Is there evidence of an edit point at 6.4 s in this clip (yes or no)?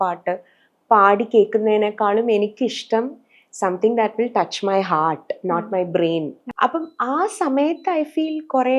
yes